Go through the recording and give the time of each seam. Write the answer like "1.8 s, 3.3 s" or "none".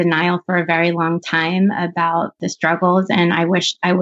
2.4 s